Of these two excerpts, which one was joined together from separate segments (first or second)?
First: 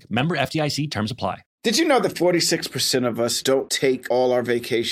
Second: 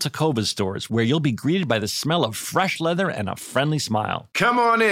first